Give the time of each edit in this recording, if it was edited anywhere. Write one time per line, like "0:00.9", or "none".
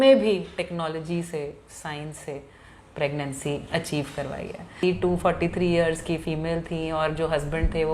0:04.8